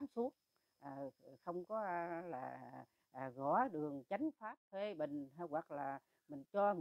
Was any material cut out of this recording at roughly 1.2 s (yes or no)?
no